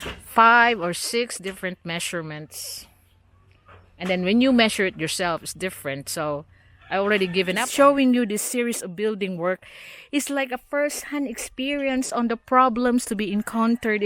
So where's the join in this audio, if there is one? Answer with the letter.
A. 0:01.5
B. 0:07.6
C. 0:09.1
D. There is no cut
B